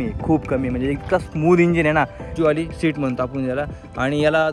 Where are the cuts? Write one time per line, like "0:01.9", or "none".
0:02.2